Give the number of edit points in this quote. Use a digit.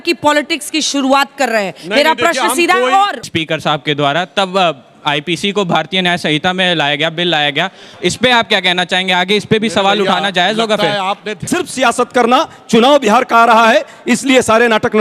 2